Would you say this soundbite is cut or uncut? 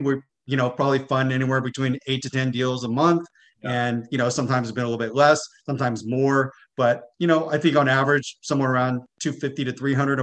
uncut